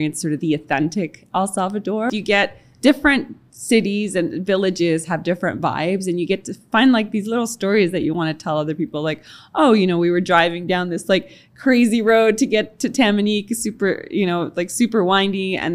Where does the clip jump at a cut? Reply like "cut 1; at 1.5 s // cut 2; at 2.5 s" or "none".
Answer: cut 1; at 2.1 s // cut 2; at 6.7 s